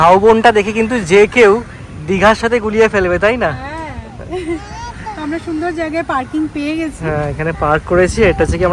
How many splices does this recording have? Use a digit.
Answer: 0